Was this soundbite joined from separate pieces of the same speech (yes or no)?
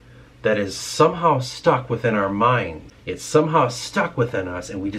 yes